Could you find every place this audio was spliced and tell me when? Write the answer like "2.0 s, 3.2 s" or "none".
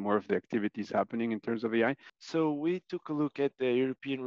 2.1 s